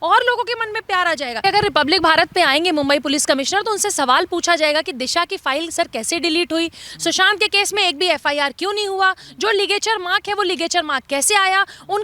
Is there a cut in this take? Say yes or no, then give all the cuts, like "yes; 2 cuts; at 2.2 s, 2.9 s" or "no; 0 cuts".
yes; 1 cut; at 1.4 s